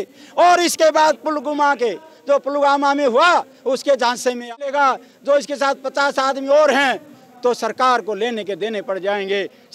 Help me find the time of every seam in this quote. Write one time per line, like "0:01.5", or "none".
0:04.6